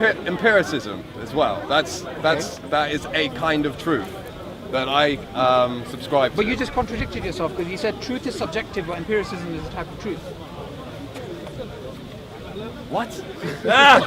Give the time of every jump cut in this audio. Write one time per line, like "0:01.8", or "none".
none